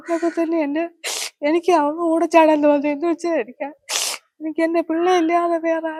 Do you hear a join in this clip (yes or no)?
no